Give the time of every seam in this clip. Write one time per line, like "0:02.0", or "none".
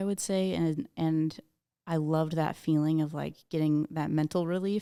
none